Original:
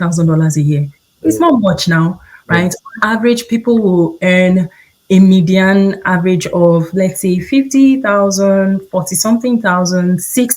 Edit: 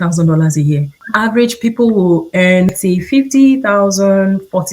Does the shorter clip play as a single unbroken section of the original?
no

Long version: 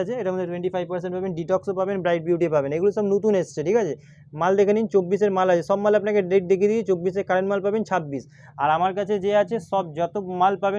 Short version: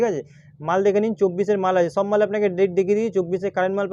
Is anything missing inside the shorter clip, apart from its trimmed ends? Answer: no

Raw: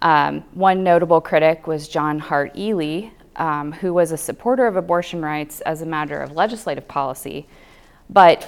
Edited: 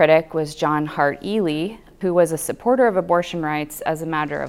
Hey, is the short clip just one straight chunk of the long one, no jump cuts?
no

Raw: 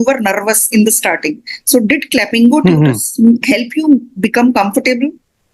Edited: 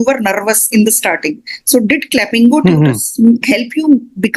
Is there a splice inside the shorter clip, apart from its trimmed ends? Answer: no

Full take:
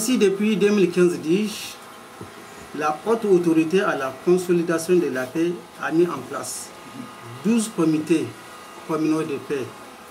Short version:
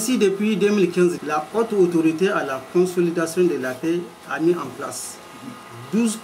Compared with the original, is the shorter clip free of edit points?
no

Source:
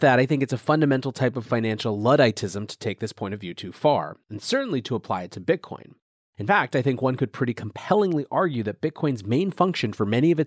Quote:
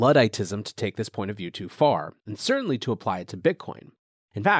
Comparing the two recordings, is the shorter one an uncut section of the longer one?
yes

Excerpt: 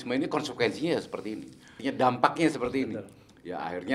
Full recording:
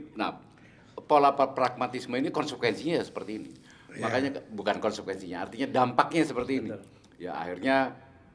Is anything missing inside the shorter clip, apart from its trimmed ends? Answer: yes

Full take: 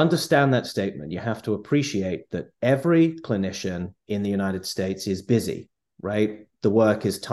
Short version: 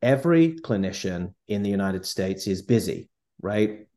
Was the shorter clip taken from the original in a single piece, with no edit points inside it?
yes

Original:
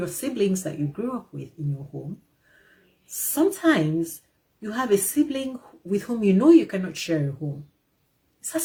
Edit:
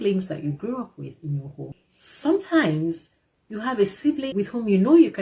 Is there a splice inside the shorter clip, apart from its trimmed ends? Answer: yes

